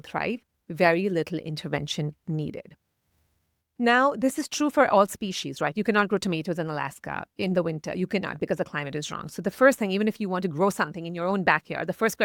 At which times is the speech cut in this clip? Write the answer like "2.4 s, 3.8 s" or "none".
none